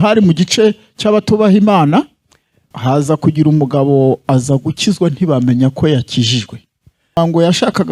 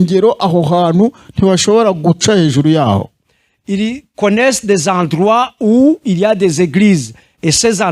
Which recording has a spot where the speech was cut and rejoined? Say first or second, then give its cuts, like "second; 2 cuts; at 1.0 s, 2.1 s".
first; 2 cuts; at 2.7 s, 7.2 s